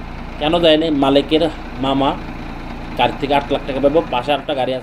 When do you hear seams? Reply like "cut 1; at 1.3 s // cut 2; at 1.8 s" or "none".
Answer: none